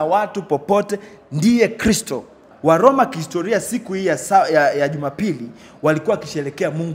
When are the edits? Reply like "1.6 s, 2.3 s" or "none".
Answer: 2.5 s

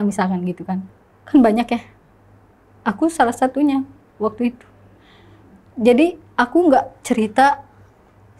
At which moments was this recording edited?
none

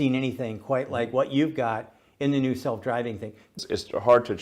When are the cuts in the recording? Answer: 3.5 s

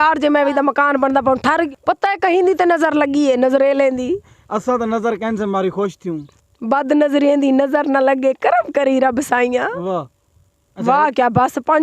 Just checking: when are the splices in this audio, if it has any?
1.7 s

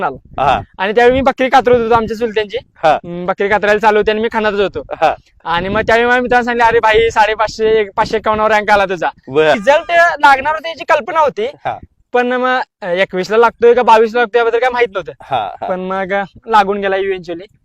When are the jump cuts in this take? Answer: 9.6 s

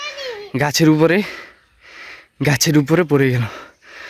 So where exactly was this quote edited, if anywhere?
none

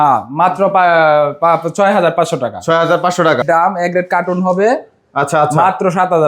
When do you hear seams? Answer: 3.4 s

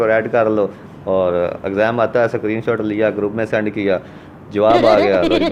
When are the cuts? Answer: none

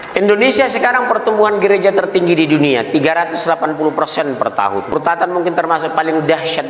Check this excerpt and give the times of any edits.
4.9 s

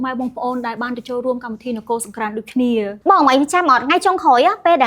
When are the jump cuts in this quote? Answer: 3.0 s

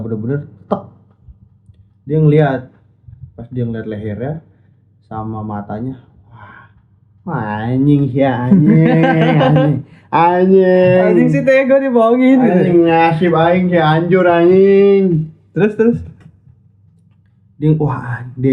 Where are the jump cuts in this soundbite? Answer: none

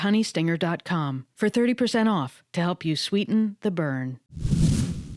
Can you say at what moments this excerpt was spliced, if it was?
4.3 s

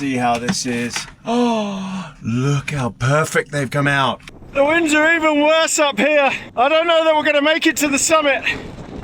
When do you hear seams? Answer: 4.3 s, 6.4 s

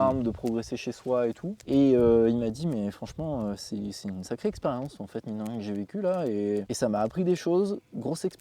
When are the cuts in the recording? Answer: 1.5 s, 6.7 s

